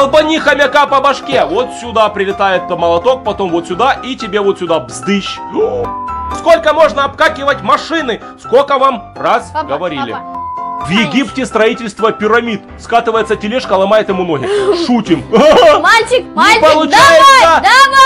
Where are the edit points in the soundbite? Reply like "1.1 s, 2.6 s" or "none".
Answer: 6.3 s, 10.8 s